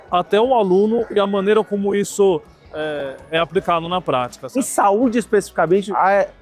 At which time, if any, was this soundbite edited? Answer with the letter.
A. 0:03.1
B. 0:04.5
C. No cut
B